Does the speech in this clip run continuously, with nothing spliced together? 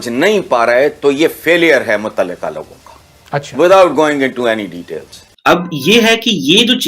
no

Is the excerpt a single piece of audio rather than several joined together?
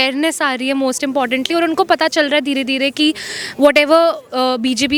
yes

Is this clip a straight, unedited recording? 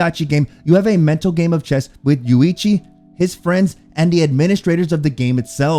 yes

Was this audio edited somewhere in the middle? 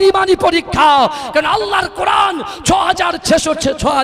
no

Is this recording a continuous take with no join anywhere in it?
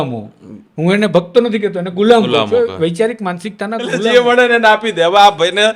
no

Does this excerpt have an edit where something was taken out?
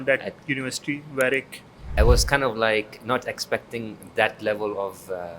yes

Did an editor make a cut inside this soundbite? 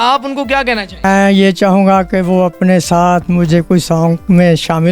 yes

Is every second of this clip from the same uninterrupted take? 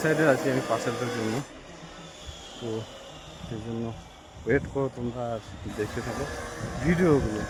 yes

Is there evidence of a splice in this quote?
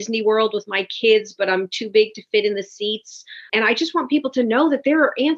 yes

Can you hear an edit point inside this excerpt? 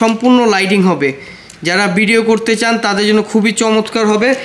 no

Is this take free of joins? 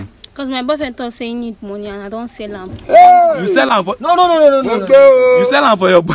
yes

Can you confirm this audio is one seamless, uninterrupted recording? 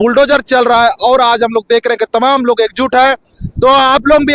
yes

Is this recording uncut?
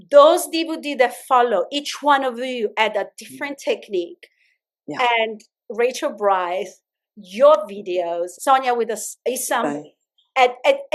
yes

